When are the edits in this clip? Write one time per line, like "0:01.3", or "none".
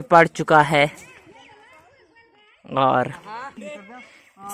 none